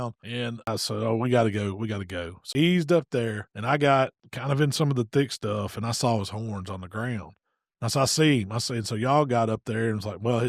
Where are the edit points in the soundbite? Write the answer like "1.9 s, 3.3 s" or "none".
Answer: 0.7 s, 2.5 s, 3.5 s